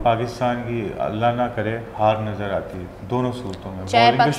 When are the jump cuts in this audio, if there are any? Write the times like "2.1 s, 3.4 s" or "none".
none